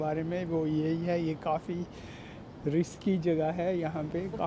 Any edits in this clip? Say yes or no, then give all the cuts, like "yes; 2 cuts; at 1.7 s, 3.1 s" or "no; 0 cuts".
no; 0 cuts